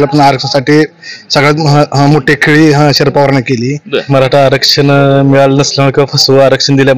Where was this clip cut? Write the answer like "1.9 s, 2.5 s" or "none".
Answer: 4.0 s